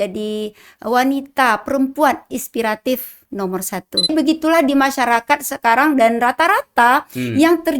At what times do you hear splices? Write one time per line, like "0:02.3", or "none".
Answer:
0:04.1